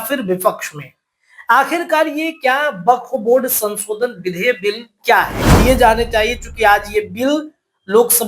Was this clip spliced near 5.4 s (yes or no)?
yes